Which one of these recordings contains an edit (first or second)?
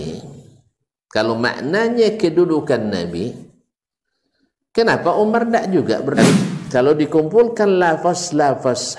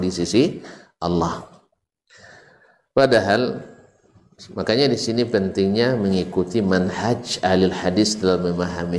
first